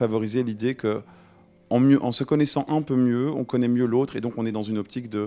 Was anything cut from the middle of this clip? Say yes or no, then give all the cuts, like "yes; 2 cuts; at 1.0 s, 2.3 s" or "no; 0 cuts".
no; 0 cuts